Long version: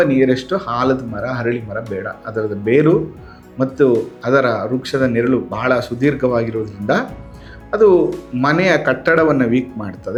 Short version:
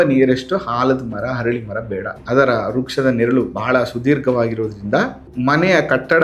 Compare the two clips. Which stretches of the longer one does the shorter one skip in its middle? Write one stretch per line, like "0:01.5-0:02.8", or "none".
0:02.2-0:04.1
0:07.2-0:08.2